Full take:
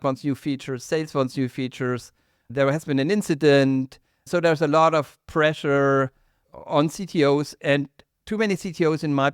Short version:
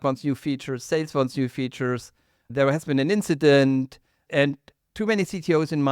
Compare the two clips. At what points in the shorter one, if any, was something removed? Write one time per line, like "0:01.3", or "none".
0:04.2